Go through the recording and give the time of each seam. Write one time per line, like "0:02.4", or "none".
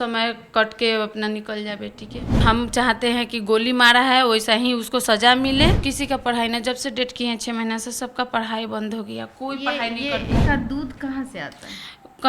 0:02.4
0:05.8
0:10.4